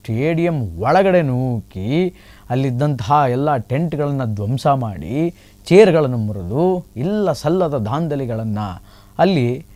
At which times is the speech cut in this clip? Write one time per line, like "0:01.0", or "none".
none

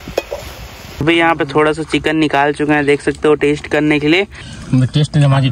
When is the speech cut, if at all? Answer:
0:00.8
0:04.5

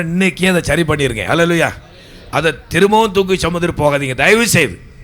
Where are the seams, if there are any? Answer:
none

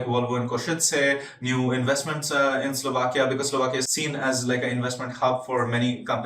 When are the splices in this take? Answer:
0:03.9

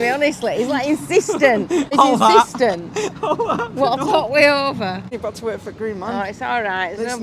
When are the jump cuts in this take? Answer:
0:01.9
0:05.2

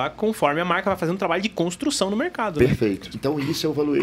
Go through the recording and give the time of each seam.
0:03.1

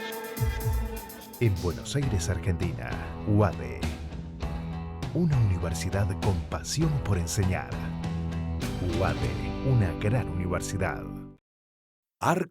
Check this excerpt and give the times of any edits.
0:01.2

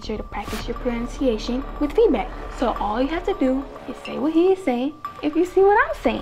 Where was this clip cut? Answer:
none

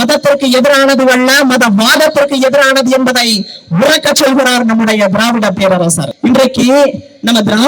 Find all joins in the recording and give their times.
0:06.1

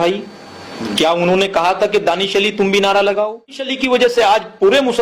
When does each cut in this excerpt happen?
0:03.7

